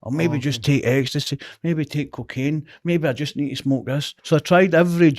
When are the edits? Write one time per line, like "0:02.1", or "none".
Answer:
0:04.1